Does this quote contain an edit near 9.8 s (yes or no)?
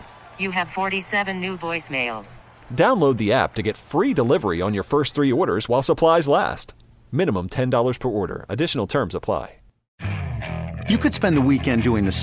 yes